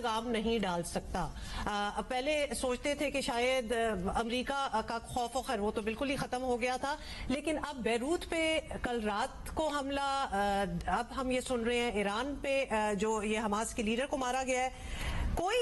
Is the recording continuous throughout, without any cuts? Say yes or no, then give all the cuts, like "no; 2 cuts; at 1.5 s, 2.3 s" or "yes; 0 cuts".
yes; 0 cuts